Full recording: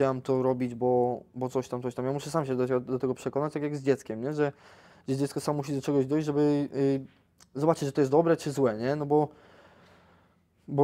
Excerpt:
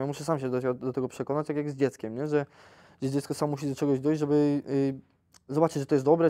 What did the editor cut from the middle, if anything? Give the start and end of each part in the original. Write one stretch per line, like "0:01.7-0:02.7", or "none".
none